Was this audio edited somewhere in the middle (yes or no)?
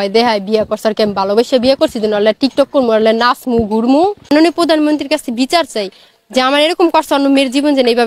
no